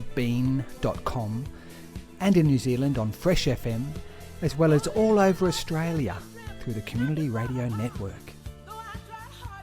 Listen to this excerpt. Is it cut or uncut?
cut